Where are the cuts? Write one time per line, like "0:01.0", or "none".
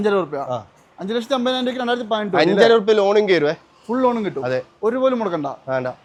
none